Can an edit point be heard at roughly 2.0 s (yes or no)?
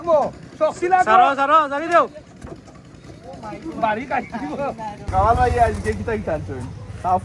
no